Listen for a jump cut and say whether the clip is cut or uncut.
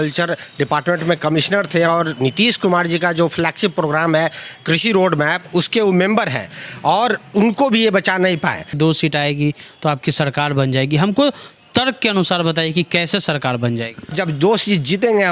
cut